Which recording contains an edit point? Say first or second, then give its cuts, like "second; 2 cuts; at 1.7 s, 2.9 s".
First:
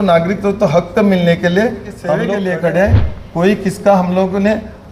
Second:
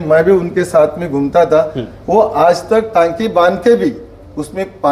first; 1 cut; at 2.1 s